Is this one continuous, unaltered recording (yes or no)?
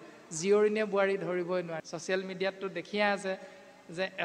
no